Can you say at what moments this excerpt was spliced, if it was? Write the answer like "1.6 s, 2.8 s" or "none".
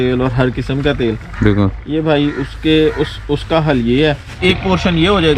4.3 s